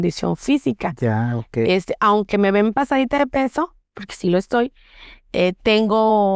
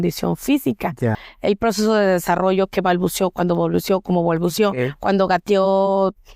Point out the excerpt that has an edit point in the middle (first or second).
second